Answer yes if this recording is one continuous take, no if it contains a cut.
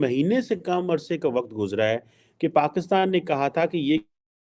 yes